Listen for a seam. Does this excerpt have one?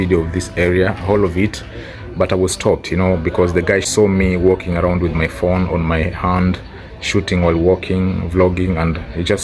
yes; 1 cut; at 3.9 s

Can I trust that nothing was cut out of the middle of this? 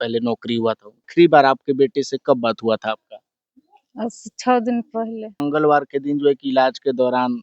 no; 2 cuts; at 1.1 s, 5.4 s

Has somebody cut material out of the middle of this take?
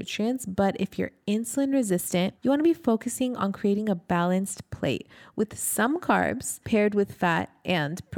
yes; 2 cuts; at 2.3 s, 6.5 s

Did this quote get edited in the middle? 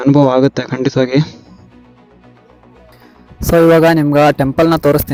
no; 0 cuts

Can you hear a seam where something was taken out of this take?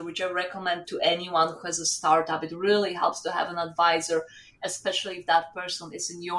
no; 0 cuts

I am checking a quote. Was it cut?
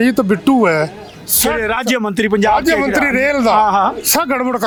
no; 0 cuts

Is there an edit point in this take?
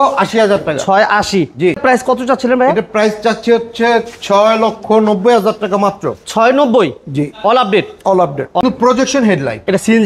yes; 2 cuts; at 1.8 s, 8.6 s

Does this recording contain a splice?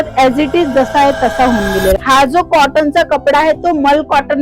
yes; 1 cut; at 2.0 s

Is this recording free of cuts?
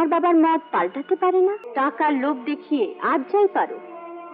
no; 1 cut; at 1.6 s

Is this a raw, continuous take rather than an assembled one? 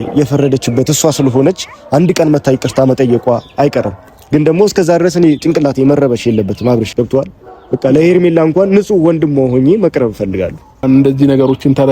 no; 2 cuts; at 6.9 s, 10.8 s

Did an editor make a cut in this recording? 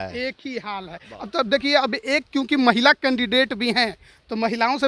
no; 0 cuts

